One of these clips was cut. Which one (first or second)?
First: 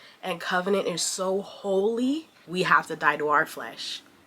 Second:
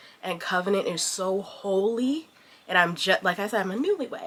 first